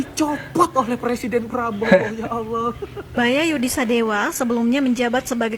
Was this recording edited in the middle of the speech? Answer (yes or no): yes